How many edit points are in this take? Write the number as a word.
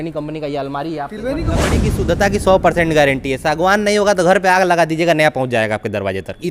one